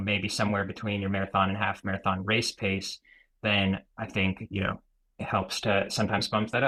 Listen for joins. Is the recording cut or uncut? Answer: uncut